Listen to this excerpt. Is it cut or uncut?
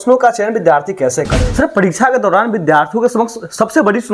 cut